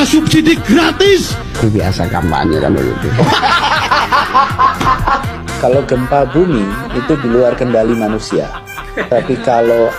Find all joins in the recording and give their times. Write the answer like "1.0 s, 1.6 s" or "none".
none